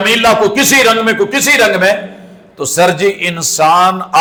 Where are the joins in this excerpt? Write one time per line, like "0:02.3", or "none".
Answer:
none